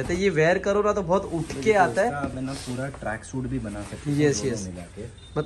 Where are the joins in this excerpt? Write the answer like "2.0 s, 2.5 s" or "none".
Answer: none